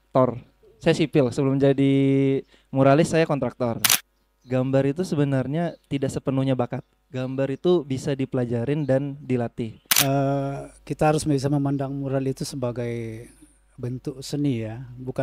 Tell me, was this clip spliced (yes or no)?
yes